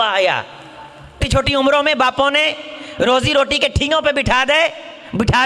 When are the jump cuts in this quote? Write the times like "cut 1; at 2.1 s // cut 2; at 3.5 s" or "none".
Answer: cut 1; at 1.2 s